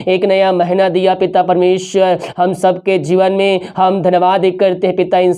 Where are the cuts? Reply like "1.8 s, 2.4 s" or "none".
none